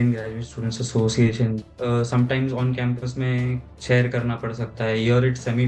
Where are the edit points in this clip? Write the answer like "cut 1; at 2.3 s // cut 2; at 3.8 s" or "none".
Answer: cut 1; at 1.6 s